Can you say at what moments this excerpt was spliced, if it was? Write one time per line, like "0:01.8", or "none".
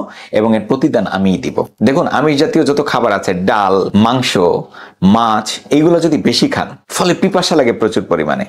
0:01.7
0:06.8